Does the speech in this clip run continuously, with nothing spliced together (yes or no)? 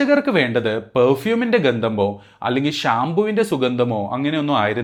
yes